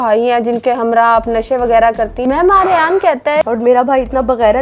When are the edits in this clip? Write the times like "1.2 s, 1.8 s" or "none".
2.2 s, 3.5 s

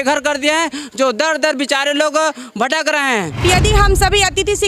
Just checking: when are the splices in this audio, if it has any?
3.4 s

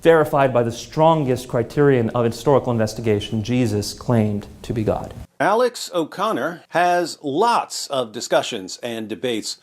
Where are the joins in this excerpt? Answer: 5.2 s, 6.6 s

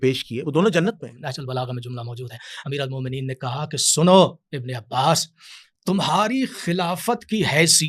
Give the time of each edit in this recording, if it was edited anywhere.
1.3 s

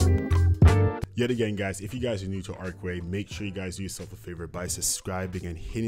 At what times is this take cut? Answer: 1.0 s

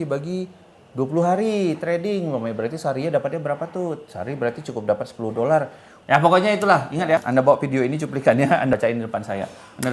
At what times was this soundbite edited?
6.1 s, 7.2 s, 8.7 s

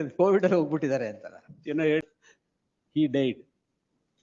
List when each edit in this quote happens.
2.0 s

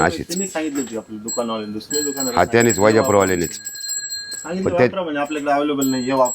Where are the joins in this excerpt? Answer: 1.9 s, 4.4 s

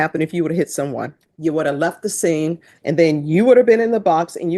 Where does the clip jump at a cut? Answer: 1.2 s, 2.7 s

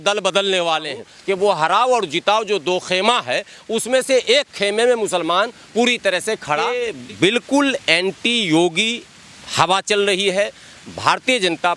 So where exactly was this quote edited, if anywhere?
1.1 s, 6.8 s

